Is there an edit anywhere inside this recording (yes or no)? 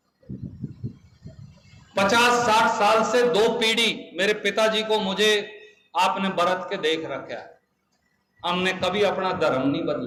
no